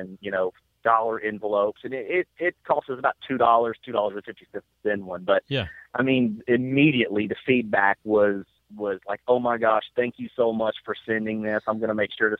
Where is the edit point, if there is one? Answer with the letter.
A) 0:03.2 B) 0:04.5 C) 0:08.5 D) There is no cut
C